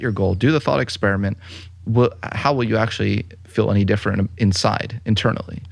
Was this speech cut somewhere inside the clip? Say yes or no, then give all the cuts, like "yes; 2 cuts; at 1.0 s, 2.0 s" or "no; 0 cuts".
no; 0 cuts